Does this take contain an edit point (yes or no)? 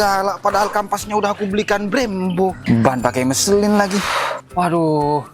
yes